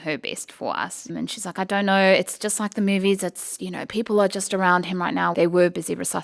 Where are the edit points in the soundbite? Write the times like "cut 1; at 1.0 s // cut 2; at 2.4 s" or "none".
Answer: cut 1; at 1.1 s // cut 2; at 5.3 s